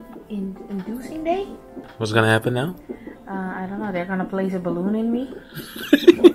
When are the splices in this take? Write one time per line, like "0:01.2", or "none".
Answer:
0:01.9